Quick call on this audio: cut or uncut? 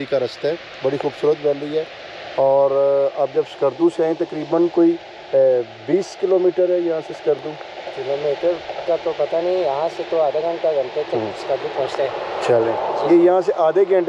uncut